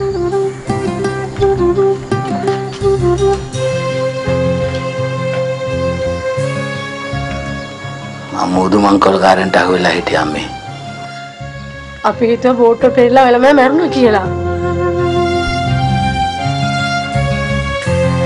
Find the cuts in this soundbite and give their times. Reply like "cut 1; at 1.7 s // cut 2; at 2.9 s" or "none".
cut 1; at 6.7 s